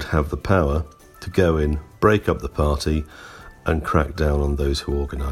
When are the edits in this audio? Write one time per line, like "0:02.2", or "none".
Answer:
none